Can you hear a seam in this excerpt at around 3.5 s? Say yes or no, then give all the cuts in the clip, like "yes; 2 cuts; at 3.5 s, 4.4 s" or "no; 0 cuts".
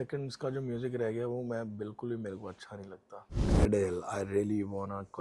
yes; 1 cut; at 3.5 s